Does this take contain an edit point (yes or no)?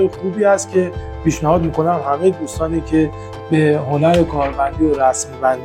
no